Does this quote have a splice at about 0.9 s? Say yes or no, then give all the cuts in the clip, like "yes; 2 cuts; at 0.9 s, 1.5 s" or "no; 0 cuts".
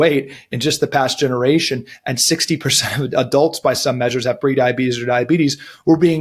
no; 0 cuts